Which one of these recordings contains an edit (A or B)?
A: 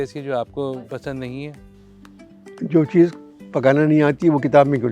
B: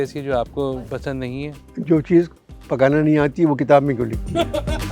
B